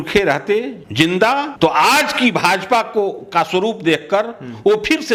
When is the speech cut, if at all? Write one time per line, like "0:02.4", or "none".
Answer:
none